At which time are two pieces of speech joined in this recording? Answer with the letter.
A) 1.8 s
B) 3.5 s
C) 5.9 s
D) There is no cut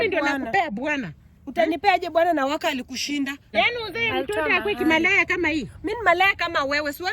B